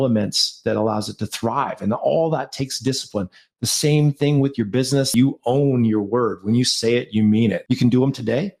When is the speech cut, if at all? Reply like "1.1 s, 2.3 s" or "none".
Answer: 5.1 s, 7.6 s